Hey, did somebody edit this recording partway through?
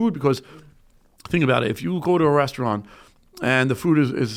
no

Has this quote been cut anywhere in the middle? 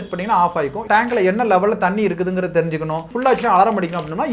yes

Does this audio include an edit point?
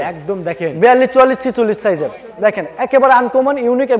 no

